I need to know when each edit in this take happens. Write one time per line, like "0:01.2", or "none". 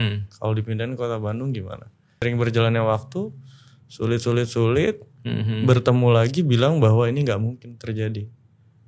0:02.2